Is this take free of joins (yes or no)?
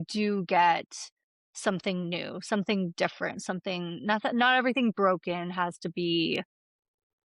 yes